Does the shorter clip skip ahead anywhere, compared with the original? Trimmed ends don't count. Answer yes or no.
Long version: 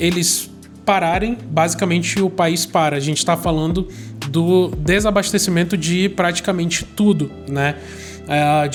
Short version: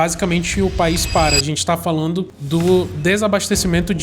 yes